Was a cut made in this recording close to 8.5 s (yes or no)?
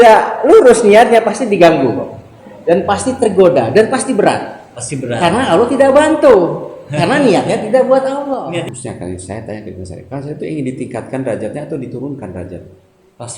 yes